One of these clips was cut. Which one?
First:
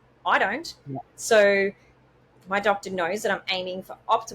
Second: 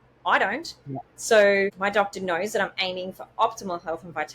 second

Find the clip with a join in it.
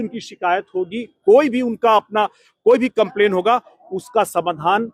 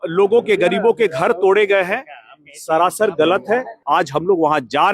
second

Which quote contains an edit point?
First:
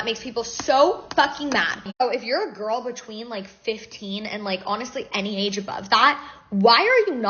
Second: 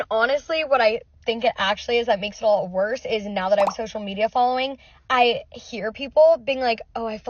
first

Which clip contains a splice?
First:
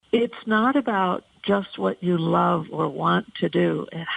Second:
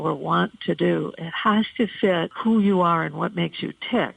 second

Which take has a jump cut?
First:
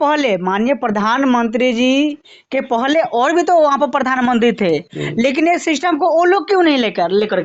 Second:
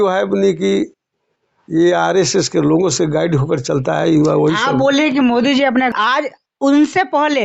second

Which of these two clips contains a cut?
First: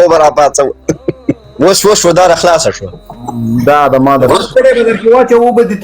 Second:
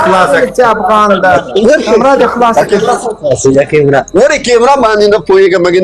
first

